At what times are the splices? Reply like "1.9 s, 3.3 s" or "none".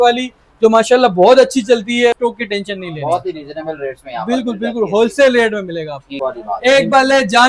2.2 s, 6.2 s

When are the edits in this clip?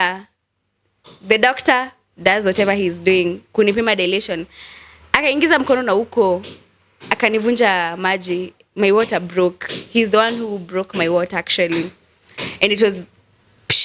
none

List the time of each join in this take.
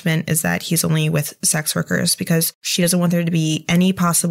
2.7 s

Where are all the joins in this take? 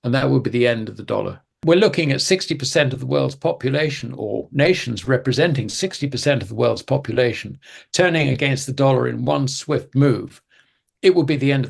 1.6 s

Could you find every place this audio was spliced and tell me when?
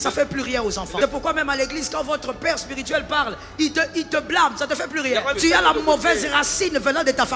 1.0 s, 5.3 s

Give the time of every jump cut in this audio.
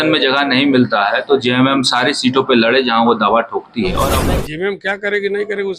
4.1 s

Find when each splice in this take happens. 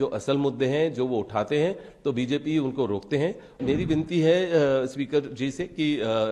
3.6 s

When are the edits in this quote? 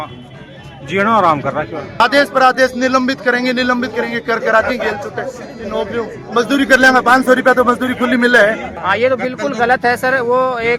2.0 s, 8.7 s

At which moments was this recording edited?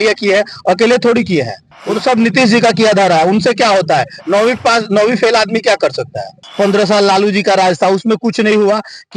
6.4 s

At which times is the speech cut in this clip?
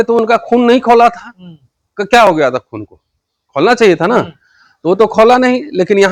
none

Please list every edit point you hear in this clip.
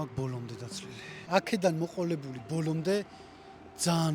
1.1 s

